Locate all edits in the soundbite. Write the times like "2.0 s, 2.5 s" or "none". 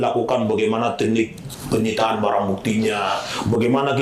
none